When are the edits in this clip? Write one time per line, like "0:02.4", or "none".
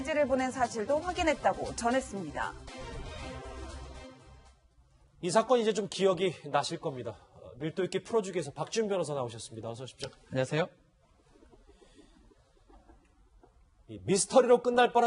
0:04.7